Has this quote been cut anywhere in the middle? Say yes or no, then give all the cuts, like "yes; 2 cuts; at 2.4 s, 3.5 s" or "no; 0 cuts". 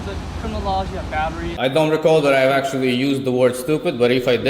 yes; 1 cut; at 1.5 s